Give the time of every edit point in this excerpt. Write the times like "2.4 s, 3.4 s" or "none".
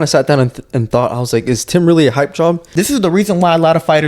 2.6 s